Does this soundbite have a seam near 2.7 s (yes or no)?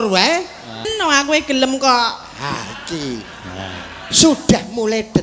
no